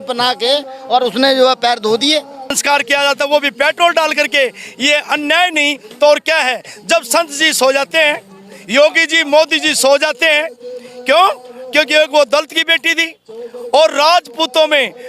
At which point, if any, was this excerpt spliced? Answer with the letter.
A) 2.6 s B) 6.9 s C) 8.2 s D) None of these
A